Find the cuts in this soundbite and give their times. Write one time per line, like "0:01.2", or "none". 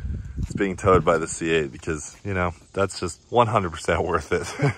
0:03.2